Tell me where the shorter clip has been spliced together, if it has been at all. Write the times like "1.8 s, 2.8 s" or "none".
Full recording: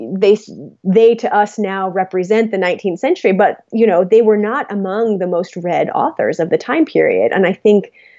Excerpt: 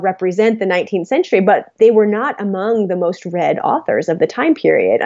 1.8 s

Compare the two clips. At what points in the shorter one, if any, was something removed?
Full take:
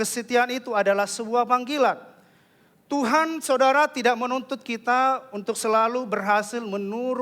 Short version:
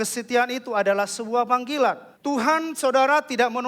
2.1 s

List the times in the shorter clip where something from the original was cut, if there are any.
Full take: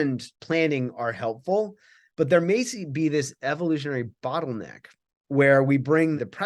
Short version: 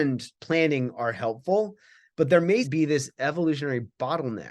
2.7 s

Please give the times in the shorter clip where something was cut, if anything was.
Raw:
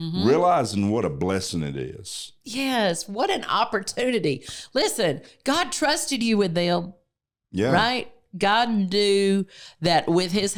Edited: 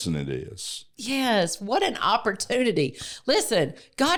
none

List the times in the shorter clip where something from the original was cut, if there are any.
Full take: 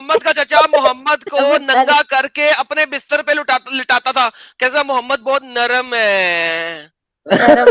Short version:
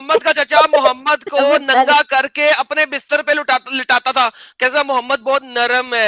none

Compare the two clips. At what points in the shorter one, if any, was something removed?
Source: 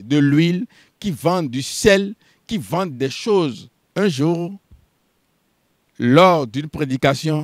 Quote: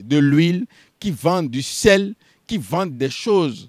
none

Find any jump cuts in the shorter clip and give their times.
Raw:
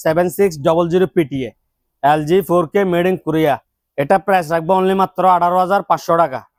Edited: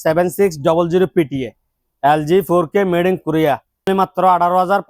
3.9 s

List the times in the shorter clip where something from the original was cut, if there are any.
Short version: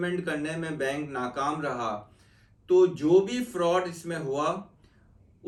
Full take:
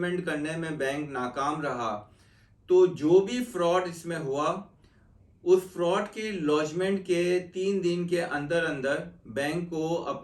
none

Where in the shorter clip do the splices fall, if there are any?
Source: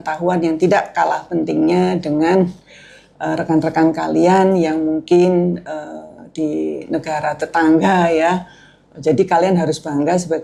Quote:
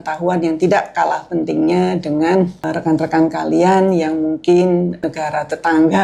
2.5 s, 5.0 s

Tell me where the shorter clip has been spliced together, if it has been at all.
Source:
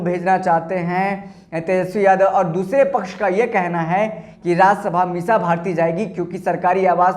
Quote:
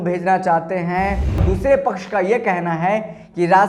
1.4 s

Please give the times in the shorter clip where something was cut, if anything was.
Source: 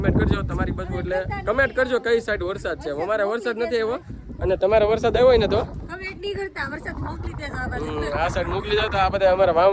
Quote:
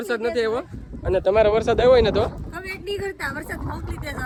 none

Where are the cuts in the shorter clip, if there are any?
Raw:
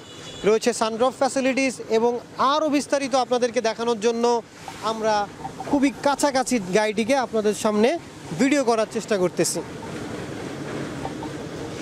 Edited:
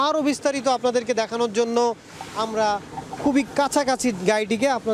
none

